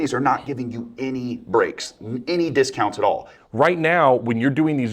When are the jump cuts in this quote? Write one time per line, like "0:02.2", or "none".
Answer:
0:03.3